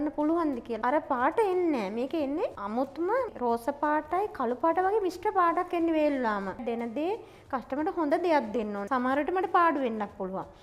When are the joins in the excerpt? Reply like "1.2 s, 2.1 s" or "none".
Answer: 0.8 s, 6.6 s